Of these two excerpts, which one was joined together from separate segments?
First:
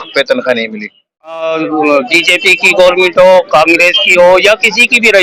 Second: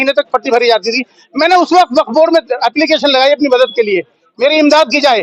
first; 1 cut; at 1.4 s

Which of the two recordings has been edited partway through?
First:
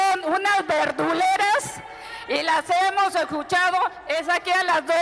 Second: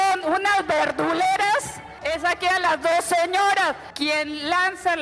second; 2 cuts; at 2.0 s, 3.9 s

